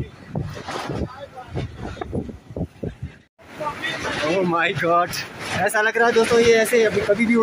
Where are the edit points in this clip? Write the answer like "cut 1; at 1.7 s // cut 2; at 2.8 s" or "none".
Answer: cut 1; at 3.3 s